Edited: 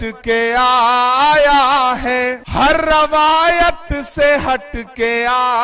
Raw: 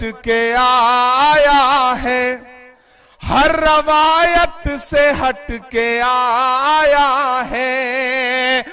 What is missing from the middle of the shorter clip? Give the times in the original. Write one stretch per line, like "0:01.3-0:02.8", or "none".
0:02.4-0:03.2